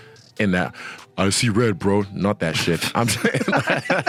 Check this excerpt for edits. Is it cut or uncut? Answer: uncut